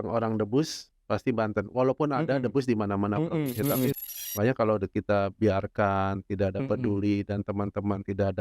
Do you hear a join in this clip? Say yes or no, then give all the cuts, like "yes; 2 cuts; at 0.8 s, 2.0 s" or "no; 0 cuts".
yes; 1 cut; at 3.9 s